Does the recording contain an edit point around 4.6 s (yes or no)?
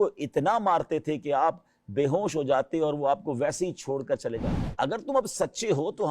yes